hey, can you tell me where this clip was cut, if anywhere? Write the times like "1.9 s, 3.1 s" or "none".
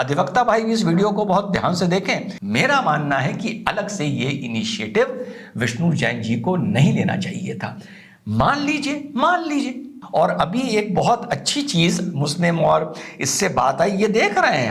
2.3 s, 10.1 s